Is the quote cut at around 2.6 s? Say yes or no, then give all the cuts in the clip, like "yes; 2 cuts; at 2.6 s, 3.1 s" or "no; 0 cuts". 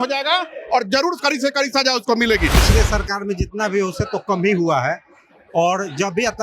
yes; 1 cut; at 2.6 s